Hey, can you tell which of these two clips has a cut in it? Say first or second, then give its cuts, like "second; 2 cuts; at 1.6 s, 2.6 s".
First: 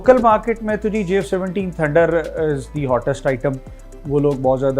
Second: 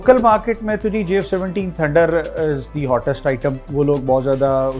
second; 1 cut; at 3.6 s